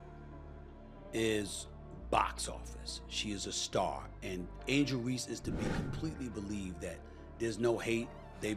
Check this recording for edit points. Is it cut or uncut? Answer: uncut